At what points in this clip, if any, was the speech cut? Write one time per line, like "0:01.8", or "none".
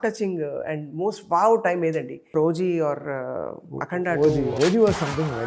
0:02.4
0:04.5